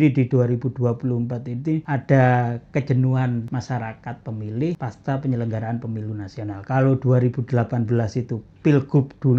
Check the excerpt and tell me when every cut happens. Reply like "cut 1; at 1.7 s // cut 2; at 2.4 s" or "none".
cut 1; at 1.8 s // cut 2; at 3.5 s // cut 3; at 4.8 s

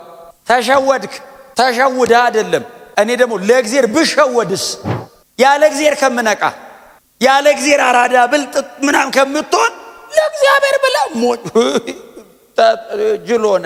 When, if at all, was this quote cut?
none

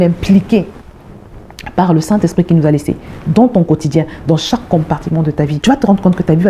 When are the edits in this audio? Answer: cut 1; at 5.6 s

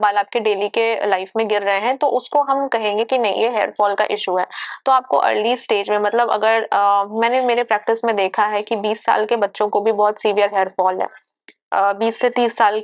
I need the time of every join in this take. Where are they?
none

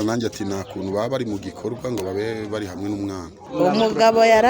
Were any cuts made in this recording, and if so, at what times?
cut 1; at 3.4 s

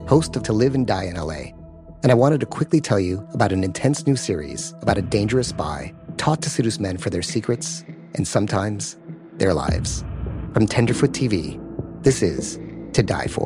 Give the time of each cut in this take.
none

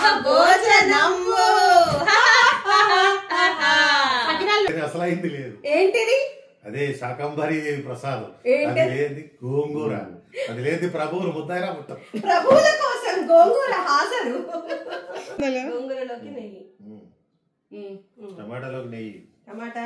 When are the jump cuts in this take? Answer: cut 1; at 4.7 s // cut 2; at 15.4 s

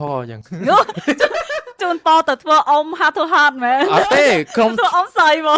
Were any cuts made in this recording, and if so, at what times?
none

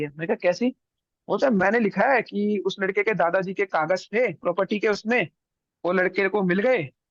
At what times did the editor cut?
none

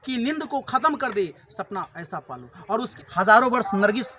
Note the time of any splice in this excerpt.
cut 1; at 3.0 s

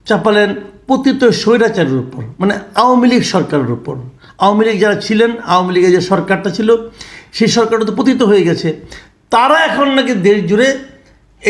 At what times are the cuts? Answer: none

